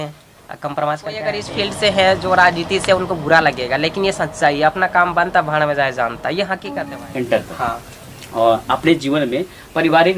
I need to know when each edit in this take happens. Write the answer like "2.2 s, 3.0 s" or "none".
1.4 s, 6.7 s